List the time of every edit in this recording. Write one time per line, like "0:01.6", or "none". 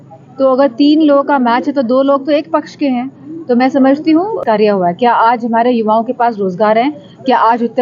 0:04.4